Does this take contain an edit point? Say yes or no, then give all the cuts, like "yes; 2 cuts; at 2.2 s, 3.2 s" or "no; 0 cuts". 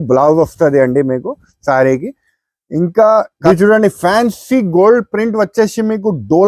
yes; 1 cut; at 3.3 s